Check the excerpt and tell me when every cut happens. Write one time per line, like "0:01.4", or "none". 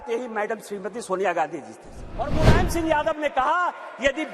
0:02.3